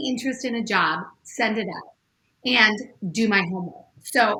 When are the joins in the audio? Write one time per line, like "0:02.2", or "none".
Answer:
none